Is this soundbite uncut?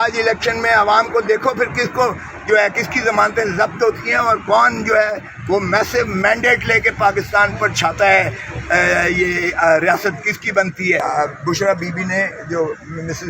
no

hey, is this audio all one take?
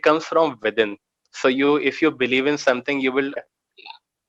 no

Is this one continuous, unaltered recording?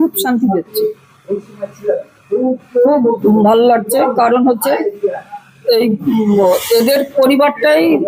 yes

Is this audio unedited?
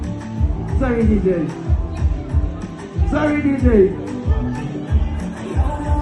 yes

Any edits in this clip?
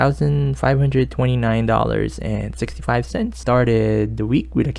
yes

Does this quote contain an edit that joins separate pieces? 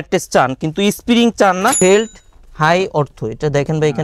yes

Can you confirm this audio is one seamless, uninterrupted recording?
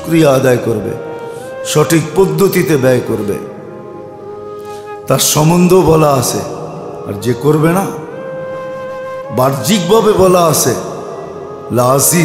no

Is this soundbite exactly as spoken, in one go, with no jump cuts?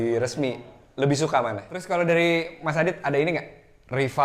no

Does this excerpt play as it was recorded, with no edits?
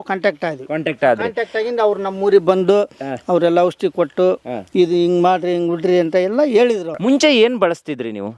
no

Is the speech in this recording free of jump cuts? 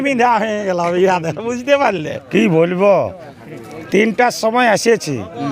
no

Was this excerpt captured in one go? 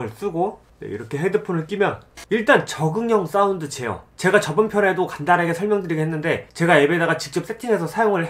no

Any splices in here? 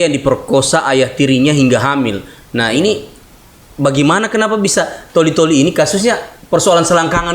no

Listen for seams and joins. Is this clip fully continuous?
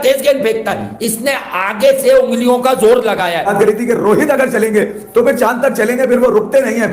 no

